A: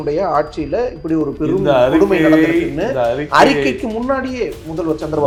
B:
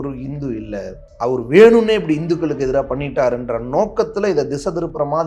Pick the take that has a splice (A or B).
B